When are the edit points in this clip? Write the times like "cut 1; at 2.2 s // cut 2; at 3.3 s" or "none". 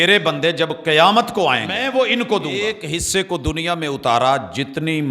cut 1; at 1.8 s // cut 2; at 2.8 s